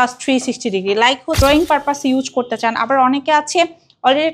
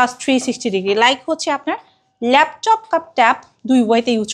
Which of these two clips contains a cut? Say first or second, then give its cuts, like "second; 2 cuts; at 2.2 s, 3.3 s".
first; 1 cut; at 1.4 s